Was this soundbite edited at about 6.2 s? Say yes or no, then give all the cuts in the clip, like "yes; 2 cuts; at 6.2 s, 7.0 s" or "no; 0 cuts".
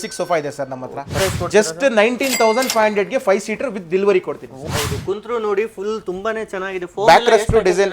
no; 2 cuts; at 1.1 s, 4.6 s